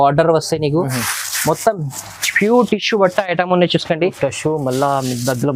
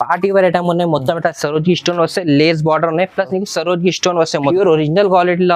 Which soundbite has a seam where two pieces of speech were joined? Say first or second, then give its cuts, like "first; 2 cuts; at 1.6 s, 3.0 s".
second; 1 cut; at 4.5 s